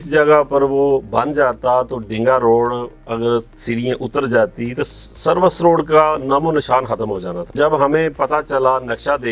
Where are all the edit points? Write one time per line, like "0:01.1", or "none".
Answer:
0:07.4